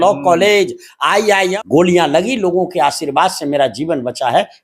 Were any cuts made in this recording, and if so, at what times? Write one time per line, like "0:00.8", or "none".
0:01.5